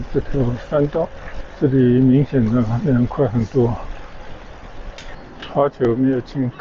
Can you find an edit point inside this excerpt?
yes; 1 cut; at 5.1 s

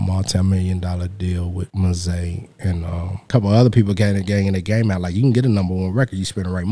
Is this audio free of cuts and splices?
no; 2 cuts; at 1.7 s, 3.2 s

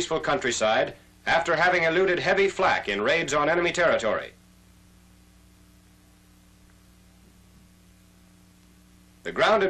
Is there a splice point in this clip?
yes; 1 cut; at 3.9 s

